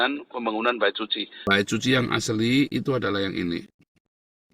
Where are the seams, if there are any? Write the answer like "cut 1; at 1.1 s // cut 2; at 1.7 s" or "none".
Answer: cut 1; at 1.3 s

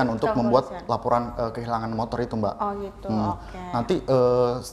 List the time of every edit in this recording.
none

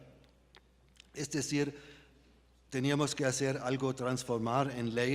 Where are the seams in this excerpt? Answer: cut 1; at 0.9 s

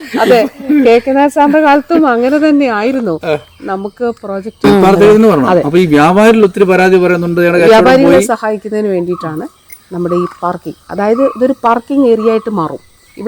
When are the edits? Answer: cut 1; at 4.6 s

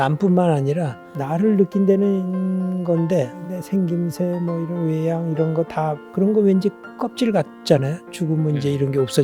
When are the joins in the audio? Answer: cut 1; at 3.4 s // cut 2; at 6.0 s

